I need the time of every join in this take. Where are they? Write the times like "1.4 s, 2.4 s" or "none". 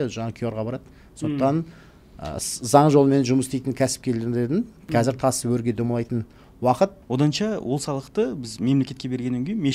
7.0 s